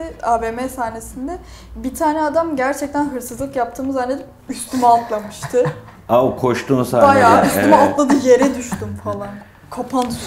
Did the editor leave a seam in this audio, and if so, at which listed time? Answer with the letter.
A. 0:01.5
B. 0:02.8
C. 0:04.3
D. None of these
D